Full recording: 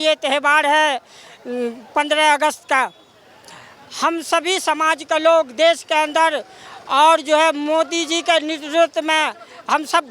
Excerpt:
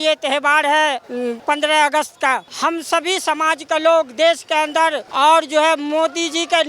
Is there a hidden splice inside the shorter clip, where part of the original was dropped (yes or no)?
yes